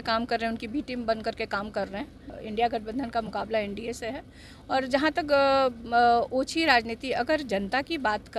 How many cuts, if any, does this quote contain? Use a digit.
1